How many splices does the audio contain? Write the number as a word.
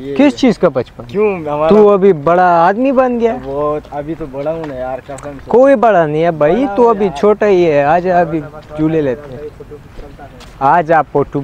zero